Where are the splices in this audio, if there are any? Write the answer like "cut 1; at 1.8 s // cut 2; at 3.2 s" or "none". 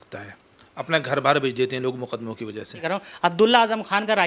cut 1; at 3.0 s